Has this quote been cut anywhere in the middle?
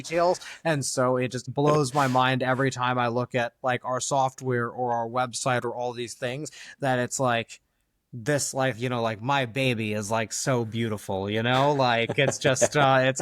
no; 0 cuts

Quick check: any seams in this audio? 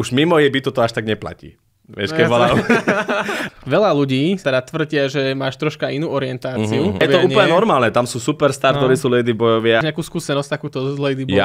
yes; 3 cuts; at 3.4 s, 7.0 s, 9.8 s

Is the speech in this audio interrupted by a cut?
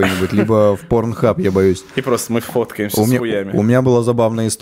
no; 0 cuts

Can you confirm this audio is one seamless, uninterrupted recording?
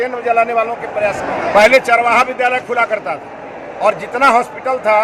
no; 1 cut; at 1.2 s

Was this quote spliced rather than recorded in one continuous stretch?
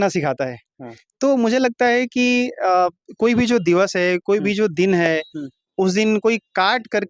no; 0 cuts

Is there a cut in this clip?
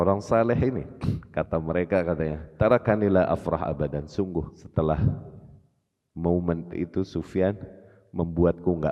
yes; 2 cuts; at 2.4 s, 4.6 s

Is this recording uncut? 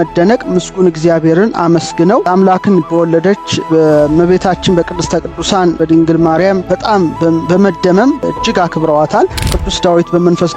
no; 6 cuts; at 2.3 s, 3.6 s, 5.8 s, 6.6 s, 8.2 s, 9.6 s

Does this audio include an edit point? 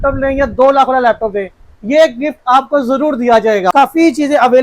yes; 1 cut; at 3.7 s

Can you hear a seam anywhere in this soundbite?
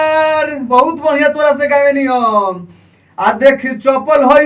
no; 0 cuts

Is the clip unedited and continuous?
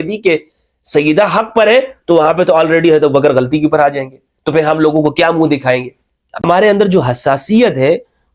no; 1 cut; at 6.4 s

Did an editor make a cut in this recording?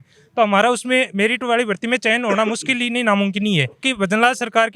yes; 1 cut; at 3.8 s

